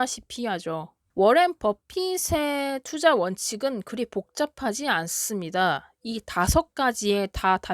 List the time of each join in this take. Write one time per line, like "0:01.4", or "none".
0:01.0